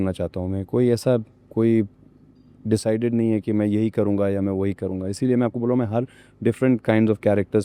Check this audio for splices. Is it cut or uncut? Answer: uncut